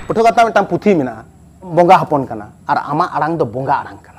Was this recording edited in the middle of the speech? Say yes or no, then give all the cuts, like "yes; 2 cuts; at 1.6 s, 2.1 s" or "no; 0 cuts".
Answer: yes; 1 cut; at 1.7 s